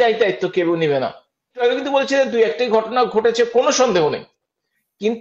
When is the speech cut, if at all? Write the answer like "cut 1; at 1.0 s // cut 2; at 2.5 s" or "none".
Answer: cut 1; at 1.6 s